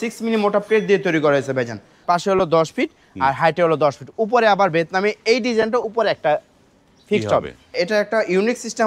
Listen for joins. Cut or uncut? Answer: cut